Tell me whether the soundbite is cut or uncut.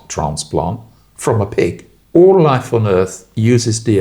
cut